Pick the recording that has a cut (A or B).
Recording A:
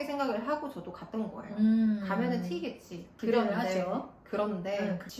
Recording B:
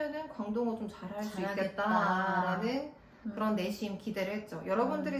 A